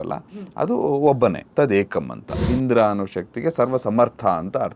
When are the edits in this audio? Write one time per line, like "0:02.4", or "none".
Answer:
0:01.4
0:02.3